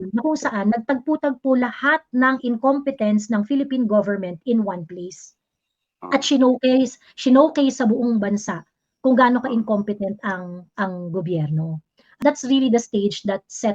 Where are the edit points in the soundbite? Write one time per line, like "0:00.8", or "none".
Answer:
0:12.1